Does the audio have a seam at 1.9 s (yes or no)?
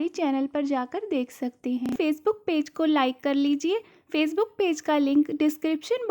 yes